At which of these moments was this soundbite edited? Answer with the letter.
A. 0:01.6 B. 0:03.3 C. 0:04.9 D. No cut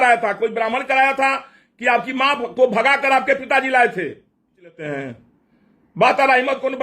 C